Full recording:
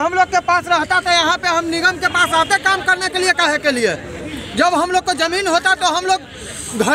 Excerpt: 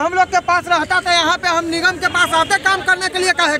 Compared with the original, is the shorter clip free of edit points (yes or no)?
yes